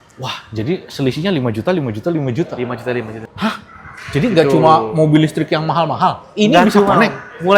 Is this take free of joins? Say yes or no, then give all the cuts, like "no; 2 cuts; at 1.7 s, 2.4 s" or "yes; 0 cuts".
no; 1 cut; at 3.2 s